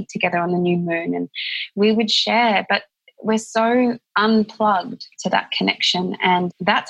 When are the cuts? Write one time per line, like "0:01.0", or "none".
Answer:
0:04.1
0:05.1